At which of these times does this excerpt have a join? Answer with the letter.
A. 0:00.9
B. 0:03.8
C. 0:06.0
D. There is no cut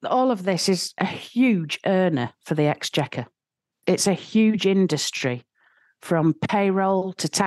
A